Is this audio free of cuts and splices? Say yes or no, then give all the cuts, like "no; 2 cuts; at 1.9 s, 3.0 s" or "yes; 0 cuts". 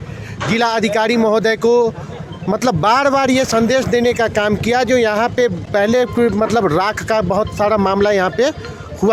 yes; 0 cuts